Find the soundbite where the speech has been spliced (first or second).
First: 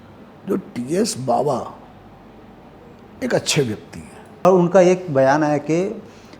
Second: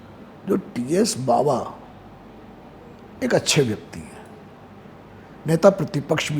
first